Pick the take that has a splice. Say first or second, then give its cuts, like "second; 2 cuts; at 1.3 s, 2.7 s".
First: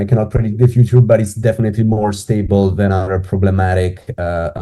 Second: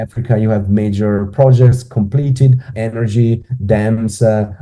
second; 1 cut; at 2.7 s